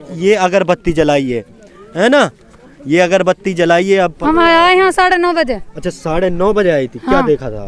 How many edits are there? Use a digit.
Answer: 1